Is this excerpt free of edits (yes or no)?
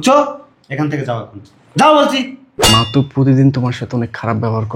no